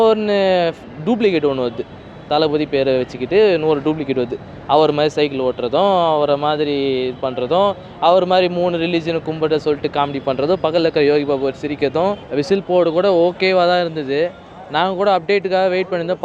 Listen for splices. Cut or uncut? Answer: cut